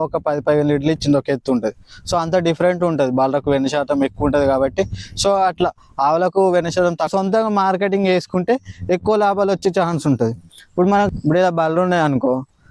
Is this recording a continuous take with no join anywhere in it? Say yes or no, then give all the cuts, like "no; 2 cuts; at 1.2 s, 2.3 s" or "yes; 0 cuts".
no; 2 cuts; at 7.1 s, 11.1 s